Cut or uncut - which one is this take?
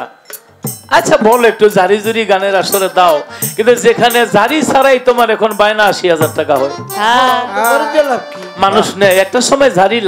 uncut